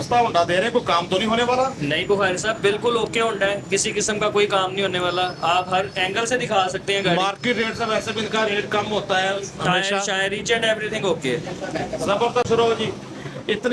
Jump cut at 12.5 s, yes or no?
yes